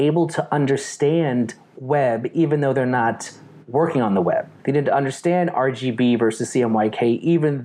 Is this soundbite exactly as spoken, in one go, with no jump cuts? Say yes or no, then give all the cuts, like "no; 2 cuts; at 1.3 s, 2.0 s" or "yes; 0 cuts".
no; 1 cut; at 4.5 s